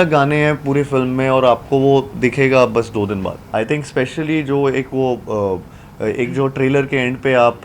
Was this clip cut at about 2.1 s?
no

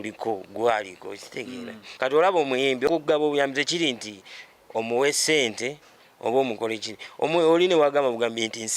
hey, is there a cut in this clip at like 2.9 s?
yes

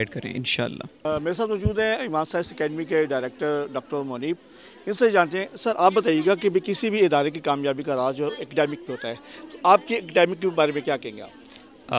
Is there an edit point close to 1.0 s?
no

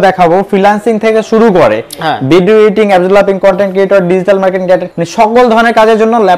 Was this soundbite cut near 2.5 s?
no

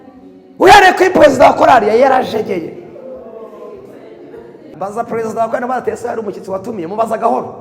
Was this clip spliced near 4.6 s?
yes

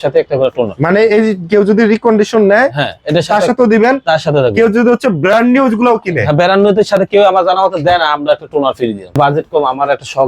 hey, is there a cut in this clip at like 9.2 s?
yes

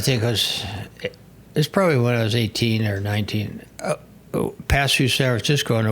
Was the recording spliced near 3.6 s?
yes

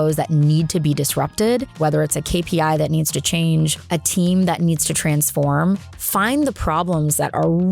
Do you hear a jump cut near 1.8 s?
yes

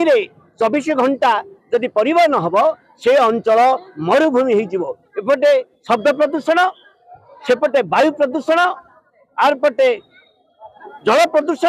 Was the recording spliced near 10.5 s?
no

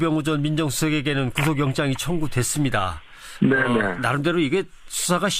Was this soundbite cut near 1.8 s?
no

